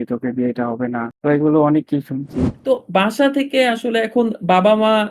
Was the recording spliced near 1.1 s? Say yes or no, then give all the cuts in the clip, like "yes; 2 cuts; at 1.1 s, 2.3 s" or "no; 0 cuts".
no; 1 cut; at 2.6 s